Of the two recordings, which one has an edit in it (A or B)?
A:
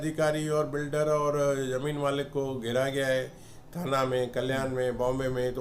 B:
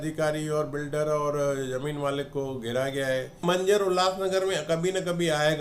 B